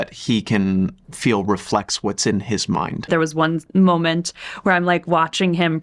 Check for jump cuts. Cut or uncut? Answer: cut